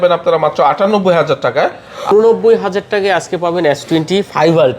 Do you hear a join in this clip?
yes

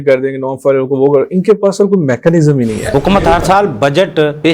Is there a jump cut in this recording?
yes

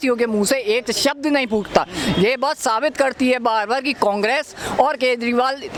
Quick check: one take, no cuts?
yes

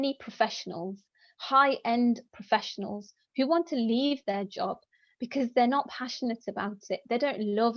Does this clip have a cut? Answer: no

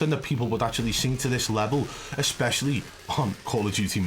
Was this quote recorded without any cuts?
yes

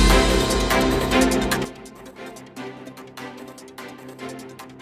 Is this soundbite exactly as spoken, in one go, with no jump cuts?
no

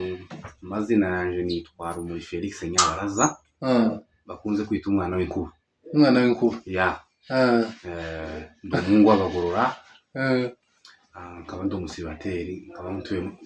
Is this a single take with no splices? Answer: yes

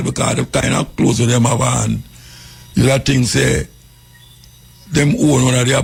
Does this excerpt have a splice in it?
no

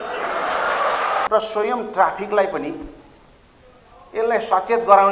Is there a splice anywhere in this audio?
yes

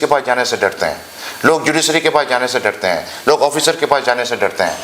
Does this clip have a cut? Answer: no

